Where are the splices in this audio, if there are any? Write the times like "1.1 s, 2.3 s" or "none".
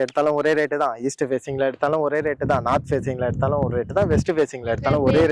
none